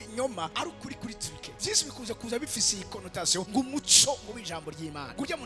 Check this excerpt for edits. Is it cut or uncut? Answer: cut